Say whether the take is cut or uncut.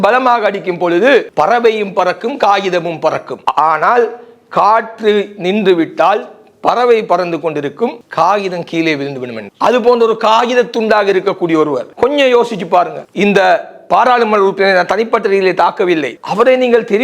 uncut